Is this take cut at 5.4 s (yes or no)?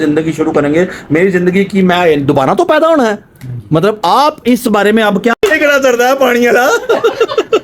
yes